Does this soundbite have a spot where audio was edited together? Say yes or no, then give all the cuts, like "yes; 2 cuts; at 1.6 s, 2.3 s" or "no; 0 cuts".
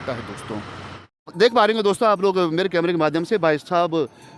yes; 1 cut; at 1.3 s